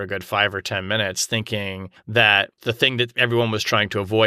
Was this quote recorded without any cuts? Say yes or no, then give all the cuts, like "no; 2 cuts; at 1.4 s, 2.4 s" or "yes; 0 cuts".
no; 2 cuts; at 1.9 s, 2.5 s